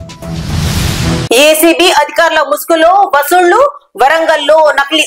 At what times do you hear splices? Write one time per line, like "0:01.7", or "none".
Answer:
none